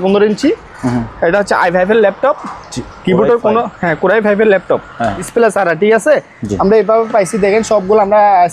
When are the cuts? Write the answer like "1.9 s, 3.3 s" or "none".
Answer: 5.3 s